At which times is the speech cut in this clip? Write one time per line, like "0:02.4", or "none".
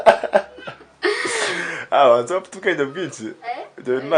none